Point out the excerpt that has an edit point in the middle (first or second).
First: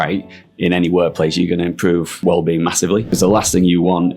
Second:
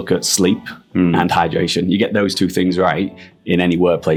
first